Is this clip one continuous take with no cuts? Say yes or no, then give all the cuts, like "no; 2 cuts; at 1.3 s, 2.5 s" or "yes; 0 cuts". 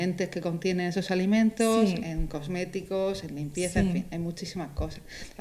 yes; 0 cuts